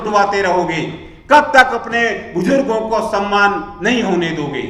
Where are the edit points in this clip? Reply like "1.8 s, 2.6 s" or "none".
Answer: none